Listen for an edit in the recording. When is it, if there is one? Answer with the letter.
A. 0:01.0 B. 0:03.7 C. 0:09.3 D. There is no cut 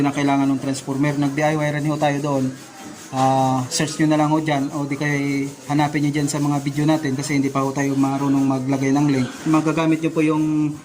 C